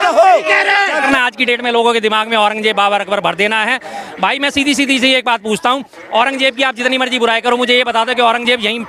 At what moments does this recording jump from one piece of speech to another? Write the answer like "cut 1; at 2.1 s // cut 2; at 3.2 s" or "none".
cut 1; at 1.0 s